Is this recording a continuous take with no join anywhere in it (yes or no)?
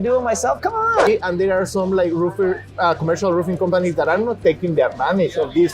no